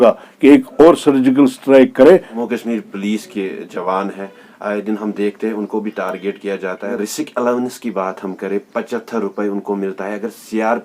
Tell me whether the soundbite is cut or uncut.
cut